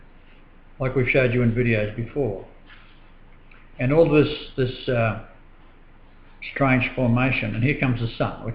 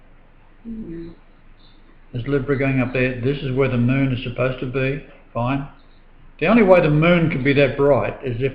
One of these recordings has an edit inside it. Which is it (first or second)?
second